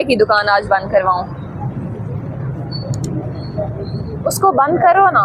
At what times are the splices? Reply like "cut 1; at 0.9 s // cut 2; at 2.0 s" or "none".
none